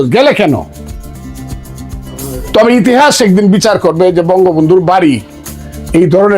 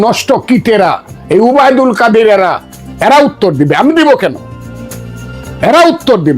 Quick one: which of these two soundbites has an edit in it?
first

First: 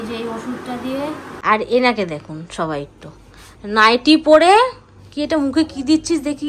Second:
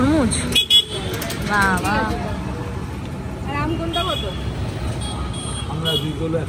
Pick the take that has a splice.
first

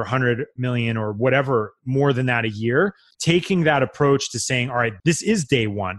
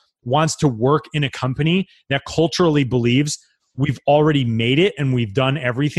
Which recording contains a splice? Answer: first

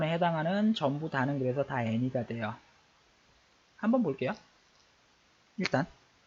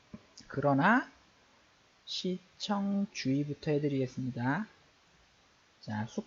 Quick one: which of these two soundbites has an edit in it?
first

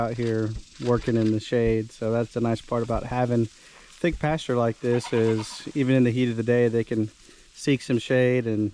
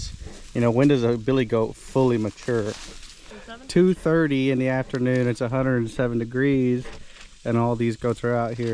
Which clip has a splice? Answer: second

